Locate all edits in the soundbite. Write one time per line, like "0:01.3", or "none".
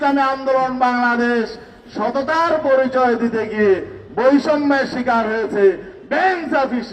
none

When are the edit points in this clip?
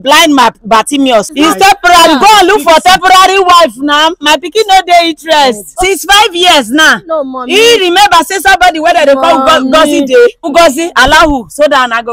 0:01.3
0:05.7
0:10.5

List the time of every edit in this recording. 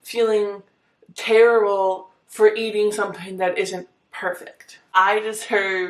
0:05.0

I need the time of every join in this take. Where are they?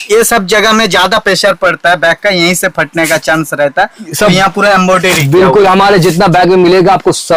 none

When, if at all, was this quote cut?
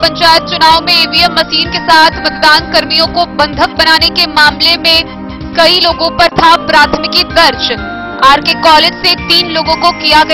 none

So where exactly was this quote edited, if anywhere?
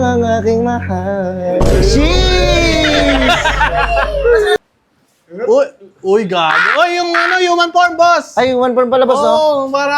0:04.6

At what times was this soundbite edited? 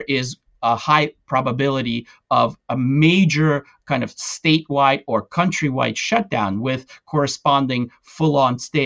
none

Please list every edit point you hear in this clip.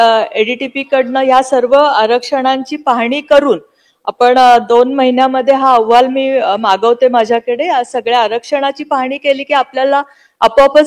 none

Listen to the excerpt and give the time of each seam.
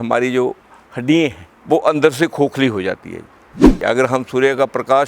0:01.5
0:03.8

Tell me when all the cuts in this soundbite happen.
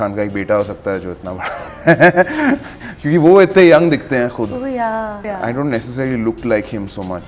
0:05.2

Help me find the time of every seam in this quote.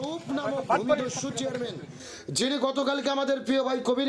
none

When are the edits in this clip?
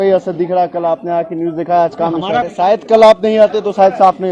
0:02.5

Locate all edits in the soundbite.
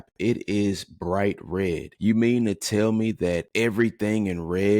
0:01.9
0:03.5

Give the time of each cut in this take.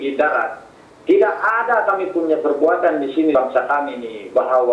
0:03.3

